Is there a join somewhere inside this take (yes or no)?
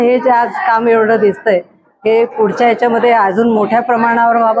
no